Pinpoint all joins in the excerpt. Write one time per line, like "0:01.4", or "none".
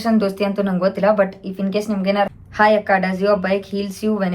0:02.3

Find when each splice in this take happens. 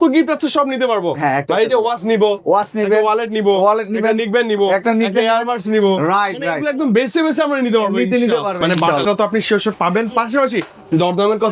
0:08.8

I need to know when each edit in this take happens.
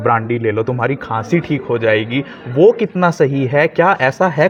none

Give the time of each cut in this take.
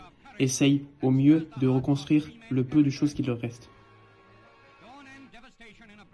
none

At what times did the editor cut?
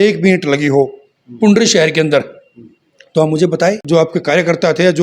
0:03.8

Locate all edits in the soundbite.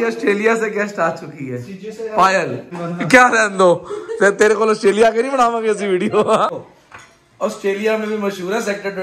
0:02.8
0:06.5

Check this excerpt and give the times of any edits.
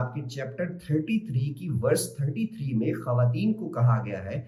none

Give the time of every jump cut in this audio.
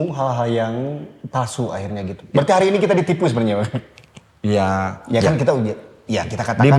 none

